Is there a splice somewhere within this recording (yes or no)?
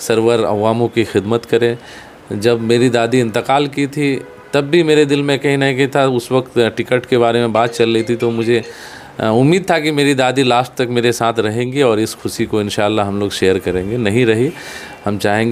no